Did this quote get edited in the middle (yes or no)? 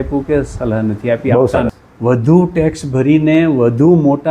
yes